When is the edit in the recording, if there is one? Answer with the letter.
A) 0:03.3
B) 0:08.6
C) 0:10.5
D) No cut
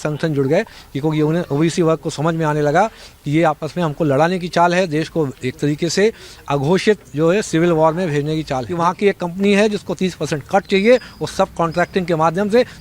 B